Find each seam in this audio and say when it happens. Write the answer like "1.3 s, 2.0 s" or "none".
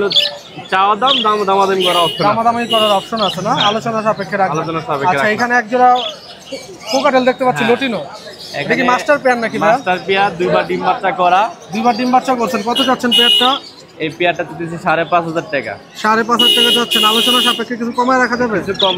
none